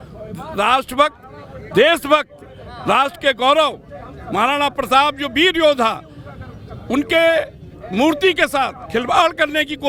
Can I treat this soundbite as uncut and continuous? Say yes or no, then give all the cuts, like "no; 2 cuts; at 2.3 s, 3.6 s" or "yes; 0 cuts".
yes; 0 cuts